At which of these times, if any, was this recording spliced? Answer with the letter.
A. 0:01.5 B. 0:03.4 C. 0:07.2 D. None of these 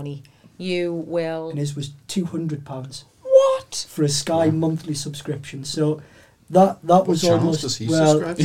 A